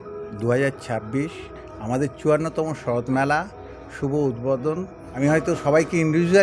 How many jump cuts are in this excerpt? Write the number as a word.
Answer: one